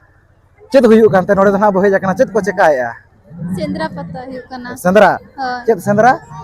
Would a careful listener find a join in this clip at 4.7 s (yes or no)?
no